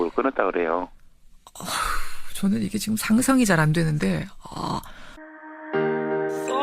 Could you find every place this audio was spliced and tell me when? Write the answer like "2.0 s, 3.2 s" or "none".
5.0 s

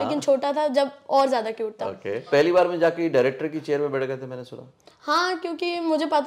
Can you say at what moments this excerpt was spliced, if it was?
2.3 s

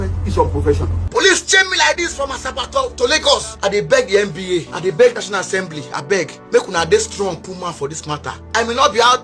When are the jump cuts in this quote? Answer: 1.0 s, 3.5 s, 4.7 s, 6.4 s, 8.5 s

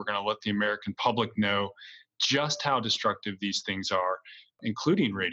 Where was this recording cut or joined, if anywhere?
none

